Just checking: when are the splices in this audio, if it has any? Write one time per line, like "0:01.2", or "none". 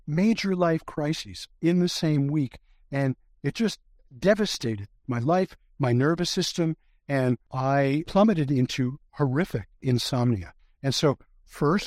0:07.8